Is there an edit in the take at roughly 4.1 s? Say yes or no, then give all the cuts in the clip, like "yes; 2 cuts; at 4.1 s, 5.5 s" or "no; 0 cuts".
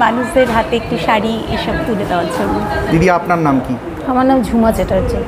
no; 1 cut; at 2.9 s